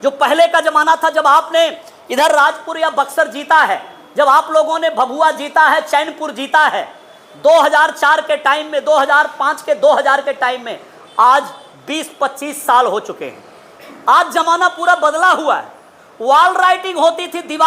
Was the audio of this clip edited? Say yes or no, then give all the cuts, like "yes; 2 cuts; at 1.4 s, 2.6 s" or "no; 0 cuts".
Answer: no; 0 cuts